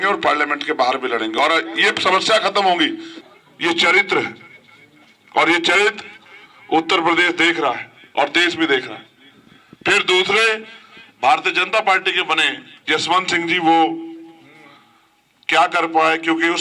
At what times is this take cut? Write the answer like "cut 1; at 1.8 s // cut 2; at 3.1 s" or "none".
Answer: cut 1; at 3.1 s